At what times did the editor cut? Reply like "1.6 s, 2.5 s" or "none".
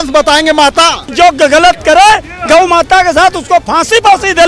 1.0 s